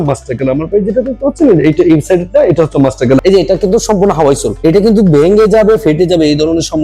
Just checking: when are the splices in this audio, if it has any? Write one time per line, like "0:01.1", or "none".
0:03.2